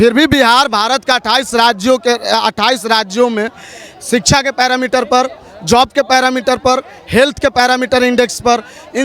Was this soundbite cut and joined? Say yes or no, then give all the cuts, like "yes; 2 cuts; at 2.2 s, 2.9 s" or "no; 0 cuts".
no; 0 cuts